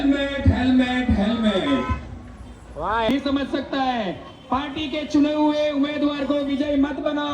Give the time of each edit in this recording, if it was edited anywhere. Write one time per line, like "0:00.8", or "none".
0:03.1